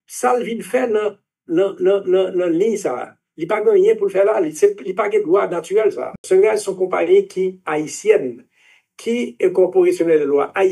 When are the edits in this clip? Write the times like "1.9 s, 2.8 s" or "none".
6.1 s